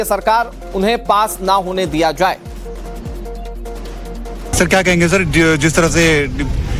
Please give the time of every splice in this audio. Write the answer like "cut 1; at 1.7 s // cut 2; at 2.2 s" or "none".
none